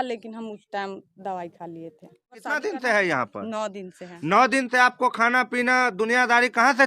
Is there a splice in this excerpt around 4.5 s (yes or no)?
no